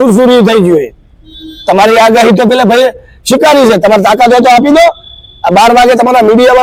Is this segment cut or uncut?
uncut